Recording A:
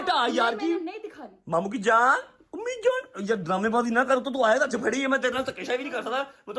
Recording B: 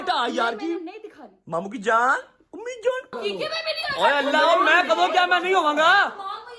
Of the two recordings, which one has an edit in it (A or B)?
B